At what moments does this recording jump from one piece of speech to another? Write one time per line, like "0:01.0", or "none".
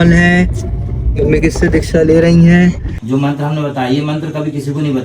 0:02.9